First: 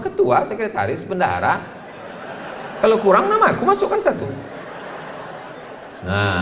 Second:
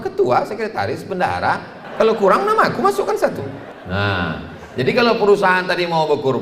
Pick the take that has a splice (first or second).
second